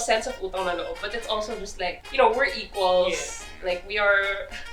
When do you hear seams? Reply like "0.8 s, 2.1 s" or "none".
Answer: 2.0 s